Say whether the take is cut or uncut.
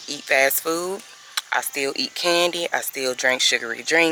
uncut